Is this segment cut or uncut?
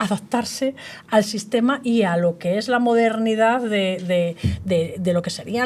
uncut